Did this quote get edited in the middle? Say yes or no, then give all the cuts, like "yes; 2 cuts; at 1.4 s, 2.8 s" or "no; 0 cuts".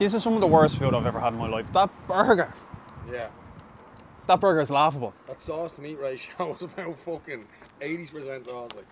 no; 0 cuts